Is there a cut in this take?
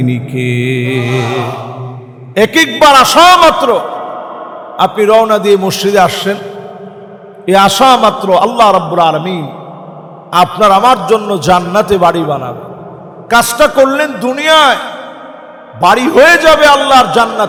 no; 0 cuts

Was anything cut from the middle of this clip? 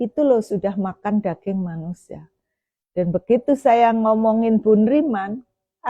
no; 0 cuts

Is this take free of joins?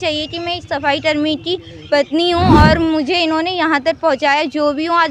yes; 0 cuts

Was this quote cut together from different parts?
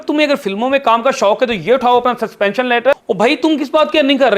yes; 1 cut; at 2.9 s

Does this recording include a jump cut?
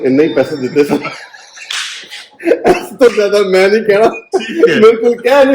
no; 0 cuts

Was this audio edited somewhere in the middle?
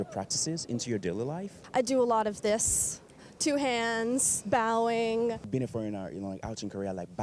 yes; 3 cuts; at 1.5 s, 4.3 s, 5.5 s

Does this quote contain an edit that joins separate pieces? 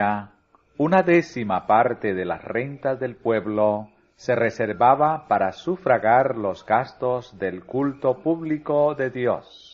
yes; 1 cut; at 3.9 s

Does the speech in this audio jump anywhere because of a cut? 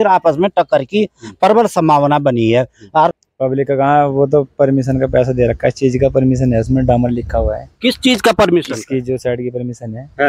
yes; 1 cut; at 3.1 s

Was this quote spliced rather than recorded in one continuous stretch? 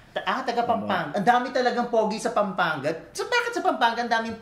no; 0 cuts

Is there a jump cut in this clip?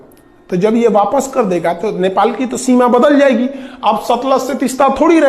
no; 0 cuts

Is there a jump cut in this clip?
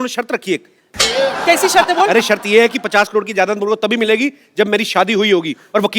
yes; 1 cut; at 0.9 s

